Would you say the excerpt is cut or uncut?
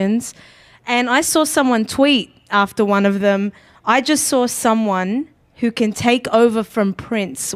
uncut